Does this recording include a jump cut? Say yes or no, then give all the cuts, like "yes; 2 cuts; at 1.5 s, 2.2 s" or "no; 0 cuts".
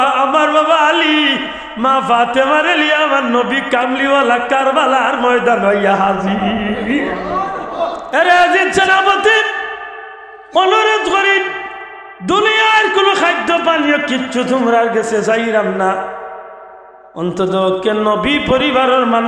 yes; 1 cut; at 8.0 s